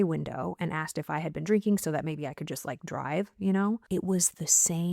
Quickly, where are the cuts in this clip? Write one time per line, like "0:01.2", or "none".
0:03.8